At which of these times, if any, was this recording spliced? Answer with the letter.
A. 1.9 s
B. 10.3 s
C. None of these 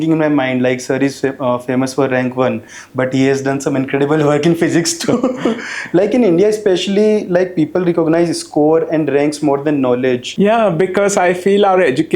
B